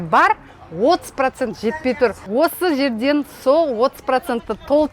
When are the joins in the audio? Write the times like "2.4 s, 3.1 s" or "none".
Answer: 2.2 s